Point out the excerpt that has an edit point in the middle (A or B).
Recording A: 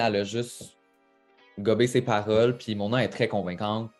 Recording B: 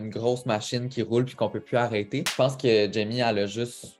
B